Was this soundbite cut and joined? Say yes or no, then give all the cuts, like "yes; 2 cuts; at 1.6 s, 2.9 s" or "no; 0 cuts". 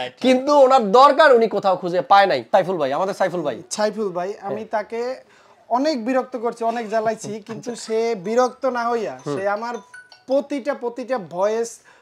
yes; 1 cut; at 2.4 s